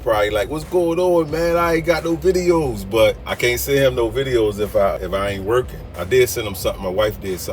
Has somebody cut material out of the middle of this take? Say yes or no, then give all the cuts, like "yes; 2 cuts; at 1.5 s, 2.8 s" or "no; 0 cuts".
yes; 2 cuts; at 3.3 s, 4.9 s